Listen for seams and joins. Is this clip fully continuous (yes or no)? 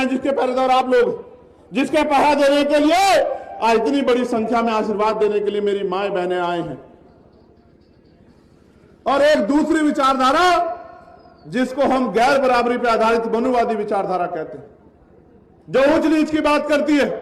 no